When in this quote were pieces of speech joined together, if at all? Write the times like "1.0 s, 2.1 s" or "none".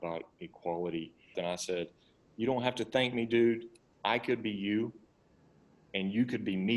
1.3 s